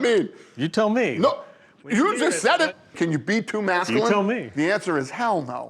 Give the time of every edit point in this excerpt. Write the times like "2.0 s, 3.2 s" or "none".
2.8 s, 4.5 s